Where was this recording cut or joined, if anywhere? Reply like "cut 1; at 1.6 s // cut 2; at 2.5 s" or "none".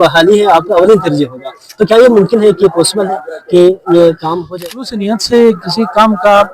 cut 1; at 4.4 s